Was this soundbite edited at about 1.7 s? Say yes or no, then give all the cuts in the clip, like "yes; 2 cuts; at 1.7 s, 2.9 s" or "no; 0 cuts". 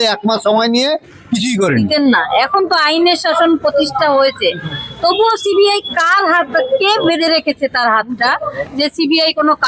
yes; 1 cut; at 1.7 s